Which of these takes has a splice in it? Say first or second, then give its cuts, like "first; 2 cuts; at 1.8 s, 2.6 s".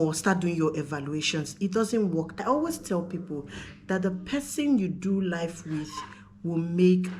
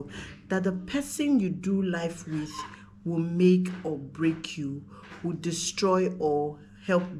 first; 1 cut; at 2.3 s